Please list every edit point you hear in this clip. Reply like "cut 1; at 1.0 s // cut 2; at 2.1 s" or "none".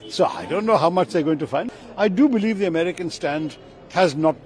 cut 1; at 1.7 s